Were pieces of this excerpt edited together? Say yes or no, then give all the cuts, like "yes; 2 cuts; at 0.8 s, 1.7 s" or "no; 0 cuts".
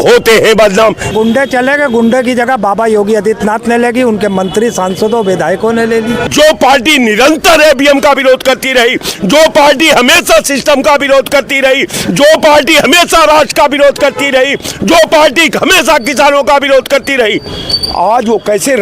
yes; 2 cuts; at 1.1 s, 6.3 s